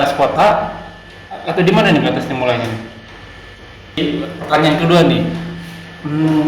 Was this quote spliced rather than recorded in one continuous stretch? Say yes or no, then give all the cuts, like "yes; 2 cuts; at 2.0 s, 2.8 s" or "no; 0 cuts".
yes; 1 cut; at 4.0 s